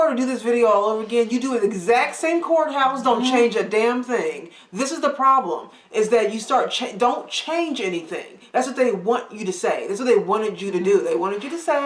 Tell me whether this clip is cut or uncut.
uncut